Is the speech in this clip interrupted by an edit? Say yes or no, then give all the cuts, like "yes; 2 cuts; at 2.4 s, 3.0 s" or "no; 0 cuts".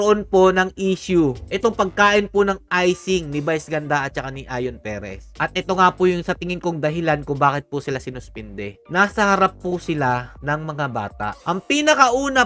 no; 0 cuts